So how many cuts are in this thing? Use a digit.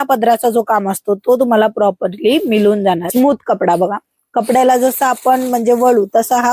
1